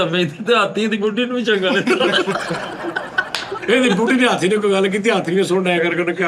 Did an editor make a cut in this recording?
yes; 1 cut; at 3.6 s

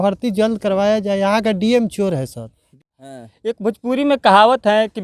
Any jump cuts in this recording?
yes; 1 cut; at 2.7 s

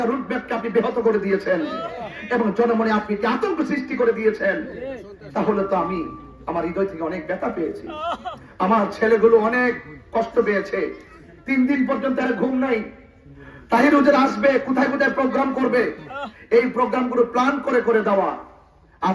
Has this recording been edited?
no; 0 cuts

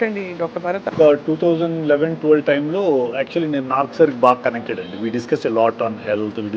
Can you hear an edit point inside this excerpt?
yes; 1 cut; at 0.9 s

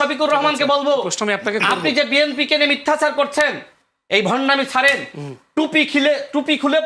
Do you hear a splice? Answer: no; 0 cuts

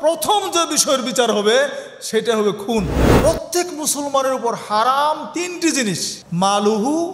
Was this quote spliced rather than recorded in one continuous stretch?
yes; 2 cuts; at 3.0 s, 6.1 s

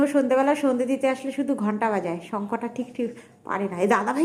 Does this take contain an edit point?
no; 0 cuts

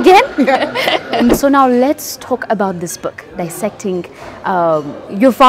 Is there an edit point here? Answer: yes; 1 cut; at 1.4 s

